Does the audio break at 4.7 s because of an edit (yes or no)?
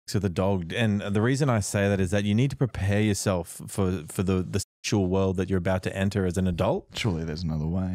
no